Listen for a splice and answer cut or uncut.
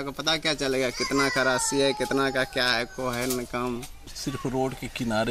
cut